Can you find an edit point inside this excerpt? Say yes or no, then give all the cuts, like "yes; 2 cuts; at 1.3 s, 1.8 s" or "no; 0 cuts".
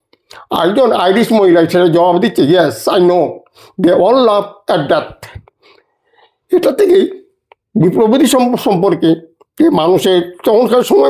no; 0 cuts